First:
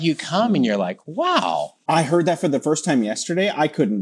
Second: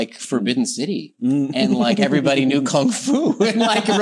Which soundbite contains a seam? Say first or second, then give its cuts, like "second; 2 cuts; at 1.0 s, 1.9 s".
first; 1 cut; at 1.7 s